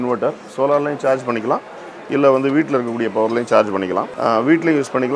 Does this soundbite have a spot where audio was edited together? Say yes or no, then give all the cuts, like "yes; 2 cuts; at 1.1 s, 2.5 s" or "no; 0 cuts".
yes; 1 cut; at 4.1 s